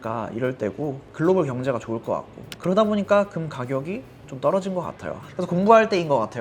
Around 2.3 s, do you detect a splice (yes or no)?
no